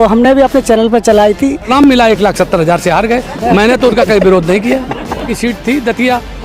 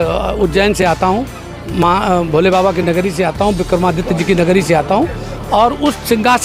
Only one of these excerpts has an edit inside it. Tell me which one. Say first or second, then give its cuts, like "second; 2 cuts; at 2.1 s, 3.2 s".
first; 2 cuts; at 1.7 s, 5.3 s